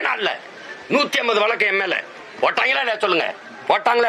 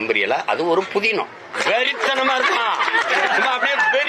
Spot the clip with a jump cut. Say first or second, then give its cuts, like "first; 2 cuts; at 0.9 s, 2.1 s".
second; 1 cut; at 1.5 s